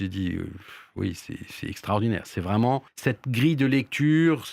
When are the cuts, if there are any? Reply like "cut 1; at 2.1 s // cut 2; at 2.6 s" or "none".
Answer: cut 1; at 2.9 s